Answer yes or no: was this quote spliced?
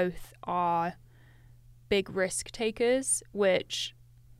no